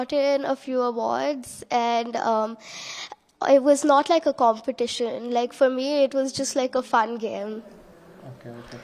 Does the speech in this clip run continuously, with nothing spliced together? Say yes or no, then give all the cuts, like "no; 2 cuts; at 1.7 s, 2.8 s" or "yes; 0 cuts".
yes; 0 cuts